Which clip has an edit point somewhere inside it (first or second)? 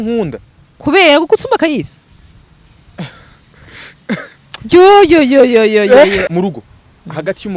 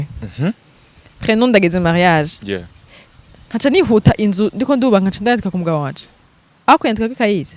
first